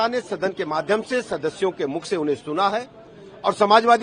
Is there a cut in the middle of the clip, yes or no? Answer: no